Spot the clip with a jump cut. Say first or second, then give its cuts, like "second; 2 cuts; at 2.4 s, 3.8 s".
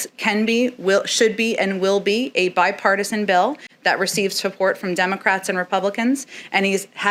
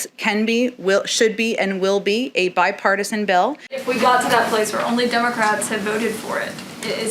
second; 1 cut; at 3.7 s